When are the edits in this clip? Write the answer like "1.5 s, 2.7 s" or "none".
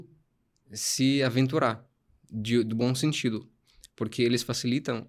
none